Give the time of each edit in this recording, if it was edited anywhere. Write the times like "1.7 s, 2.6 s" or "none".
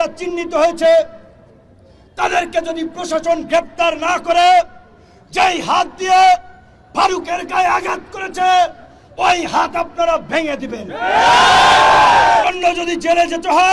12.4 s